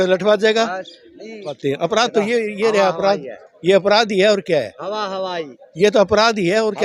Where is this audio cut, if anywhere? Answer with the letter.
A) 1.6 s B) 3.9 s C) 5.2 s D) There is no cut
A